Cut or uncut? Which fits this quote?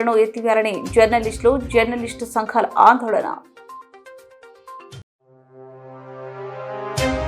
uncut